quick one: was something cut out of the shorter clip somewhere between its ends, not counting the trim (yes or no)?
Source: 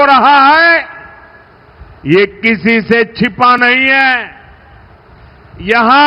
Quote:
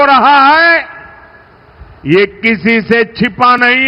no